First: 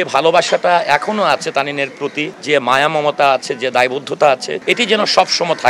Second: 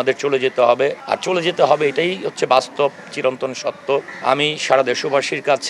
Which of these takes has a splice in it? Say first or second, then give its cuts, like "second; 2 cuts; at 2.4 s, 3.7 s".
first; 2 cuts; at 2.3 s, 4.5 s